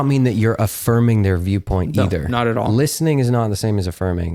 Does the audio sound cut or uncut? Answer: uncut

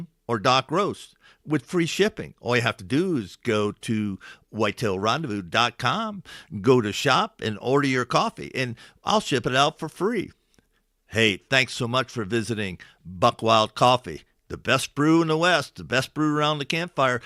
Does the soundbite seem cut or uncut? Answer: uncut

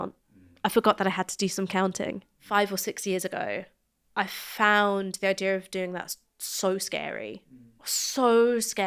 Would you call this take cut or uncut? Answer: cut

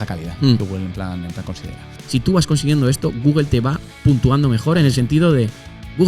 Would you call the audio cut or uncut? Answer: cut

